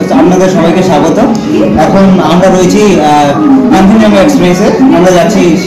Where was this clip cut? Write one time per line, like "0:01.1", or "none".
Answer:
none